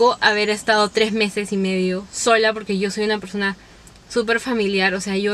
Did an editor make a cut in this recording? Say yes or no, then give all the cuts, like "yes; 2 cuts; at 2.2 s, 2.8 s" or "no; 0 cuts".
no; 0 cuts